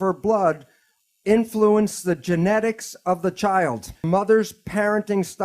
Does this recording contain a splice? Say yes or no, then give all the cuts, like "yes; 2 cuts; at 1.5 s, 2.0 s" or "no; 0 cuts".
yes; 1 cut; at 4.0 s